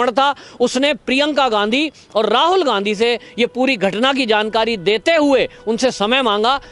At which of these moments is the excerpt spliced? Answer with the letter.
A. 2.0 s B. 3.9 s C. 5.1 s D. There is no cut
D